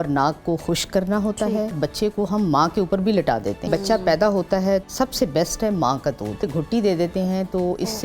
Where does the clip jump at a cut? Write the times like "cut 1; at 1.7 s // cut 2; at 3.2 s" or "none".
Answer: cut 1; at 1.8 s // cut 2; at 3.7 s // cut 3; at 4.8 s // cut 4; at 6.5 s